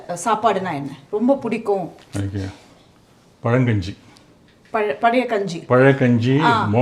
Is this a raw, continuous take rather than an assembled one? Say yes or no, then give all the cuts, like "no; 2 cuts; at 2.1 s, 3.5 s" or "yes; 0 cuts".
yes; 0 cuts